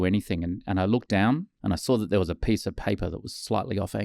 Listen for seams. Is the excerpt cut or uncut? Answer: uncut